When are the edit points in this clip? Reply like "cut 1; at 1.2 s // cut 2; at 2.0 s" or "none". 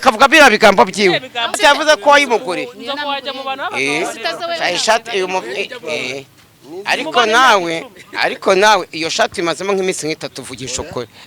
cut 1; at 1.6 s